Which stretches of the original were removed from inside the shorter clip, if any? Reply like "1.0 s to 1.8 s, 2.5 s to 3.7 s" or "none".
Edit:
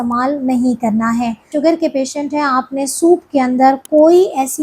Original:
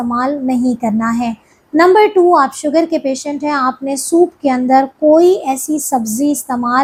1.5 s to 2.6 s